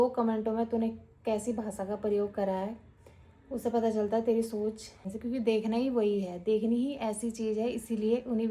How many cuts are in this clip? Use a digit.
1